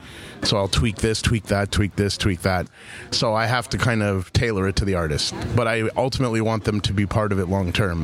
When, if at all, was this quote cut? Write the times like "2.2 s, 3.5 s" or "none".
2.7 s